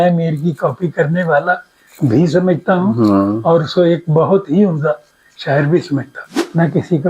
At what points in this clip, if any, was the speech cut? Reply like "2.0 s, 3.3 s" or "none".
6.2 s